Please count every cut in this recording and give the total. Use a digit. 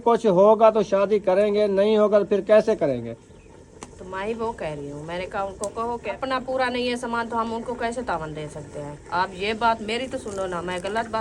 2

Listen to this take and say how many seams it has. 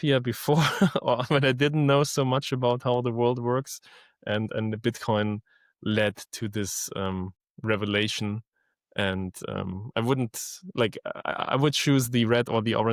1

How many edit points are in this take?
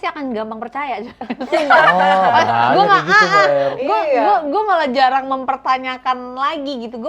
0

